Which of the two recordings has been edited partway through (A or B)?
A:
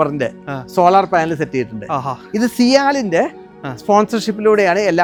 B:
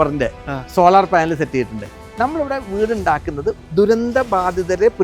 B